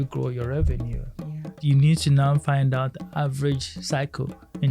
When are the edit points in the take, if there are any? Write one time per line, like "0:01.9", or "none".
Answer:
0:01.6